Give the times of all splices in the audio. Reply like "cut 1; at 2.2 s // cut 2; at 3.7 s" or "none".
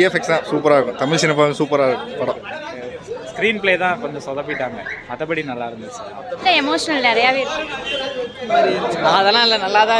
cut 1; at 2.9 s // cut 2; at 6.4 s // cut 3; at 8.5 s